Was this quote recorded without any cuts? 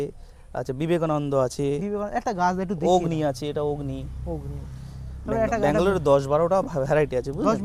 yes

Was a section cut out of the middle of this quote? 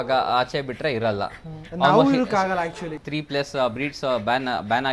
yes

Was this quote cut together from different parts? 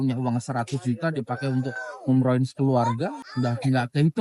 yes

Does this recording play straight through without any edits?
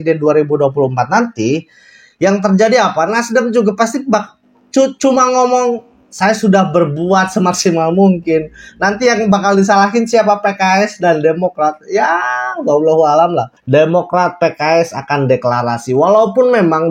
no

